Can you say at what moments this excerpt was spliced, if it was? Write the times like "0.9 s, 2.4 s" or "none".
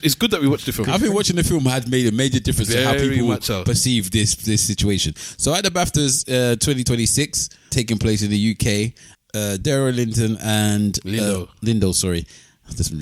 7.7 s, 9.1 s